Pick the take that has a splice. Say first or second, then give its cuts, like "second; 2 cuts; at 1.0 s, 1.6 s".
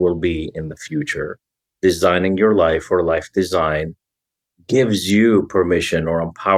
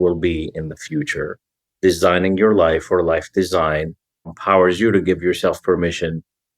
second; 1 cut; at 4.3 s